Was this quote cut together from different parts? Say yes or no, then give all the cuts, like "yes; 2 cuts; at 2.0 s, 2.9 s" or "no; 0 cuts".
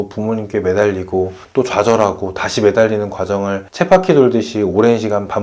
no; 0 cuts